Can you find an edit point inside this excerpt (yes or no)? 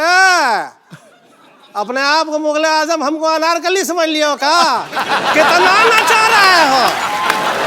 no